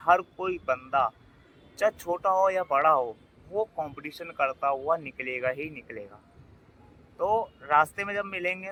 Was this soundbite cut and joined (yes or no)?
no